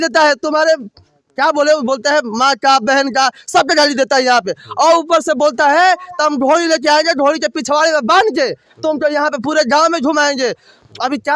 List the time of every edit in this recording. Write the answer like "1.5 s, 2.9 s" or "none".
none